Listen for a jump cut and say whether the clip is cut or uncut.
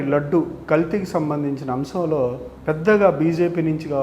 cut